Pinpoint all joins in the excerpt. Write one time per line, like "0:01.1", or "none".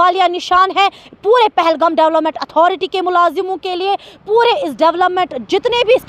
none